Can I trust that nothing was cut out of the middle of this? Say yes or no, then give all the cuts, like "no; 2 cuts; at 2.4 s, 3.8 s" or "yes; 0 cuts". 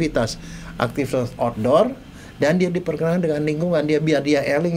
yes; 0 cuts